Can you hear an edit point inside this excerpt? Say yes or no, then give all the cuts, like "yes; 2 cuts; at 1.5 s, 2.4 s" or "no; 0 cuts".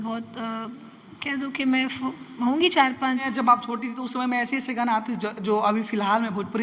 yes; 1 cut; at 3.2 s